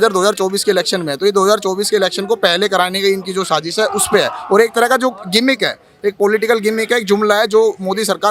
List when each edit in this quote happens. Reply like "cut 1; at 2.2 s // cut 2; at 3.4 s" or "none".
none